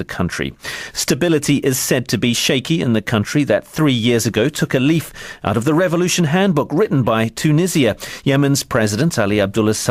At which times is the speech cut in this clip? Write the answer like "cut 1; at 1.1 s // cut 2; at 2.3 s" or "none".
cut 1; at 5.5 s